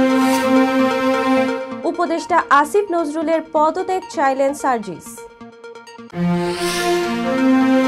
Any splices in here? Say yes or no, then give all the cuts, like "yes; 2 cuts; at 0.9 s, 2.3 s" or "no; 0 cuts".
yes; 1 cut; at 1.7 s